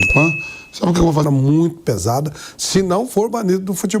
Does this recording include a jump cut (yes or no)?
yes